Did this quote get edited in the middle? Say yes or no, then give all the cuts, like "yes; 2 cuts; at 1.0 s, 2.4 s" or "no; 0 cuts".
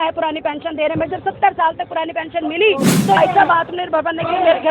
yes; 1 cut; at 3.2 s